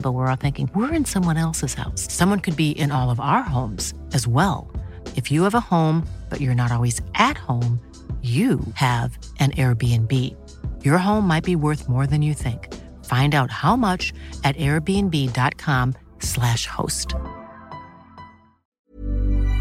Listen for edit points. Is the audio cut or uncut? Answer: cut